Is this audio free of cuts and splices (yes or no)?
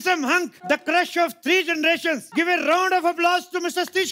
no